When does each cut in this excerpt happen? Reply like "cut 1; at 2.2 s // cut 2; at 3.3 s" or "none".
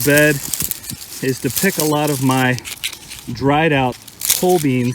cut 1; at 4.0 s